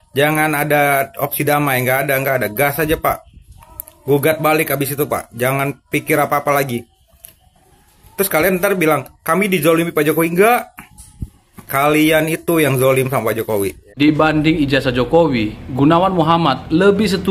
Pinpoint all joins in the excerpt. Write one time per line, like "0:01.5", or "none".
0:13.8